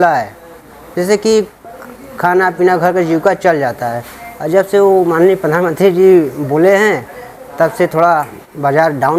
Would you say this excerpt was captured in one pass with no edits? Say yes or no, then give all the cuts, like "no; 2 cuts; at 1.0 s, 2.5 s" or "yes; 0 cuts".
yes; 0 cuts